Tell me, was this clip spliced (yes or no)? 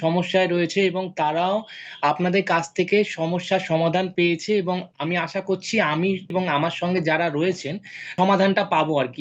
yes